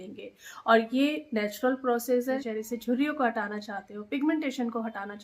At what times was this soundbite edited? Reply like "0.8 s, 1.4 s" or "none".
2.4 s